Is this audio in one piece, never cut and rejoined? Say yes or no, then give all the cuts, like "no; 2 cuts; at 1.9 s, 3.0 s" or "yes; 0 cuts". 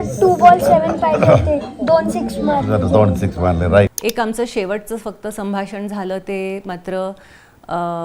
no; 1 cut; at 3.9 s